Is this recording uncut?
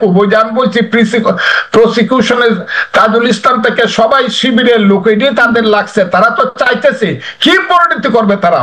yes; 0 cuts

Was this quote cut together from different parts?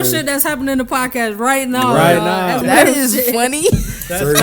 yes; 1 cut; at 2.6 s

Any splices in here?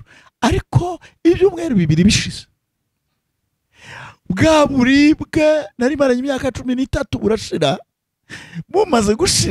no; 0 cuts

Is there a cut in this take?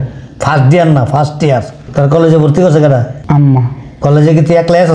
yes; 2 cuts; at 1.8 s, 3.1 s

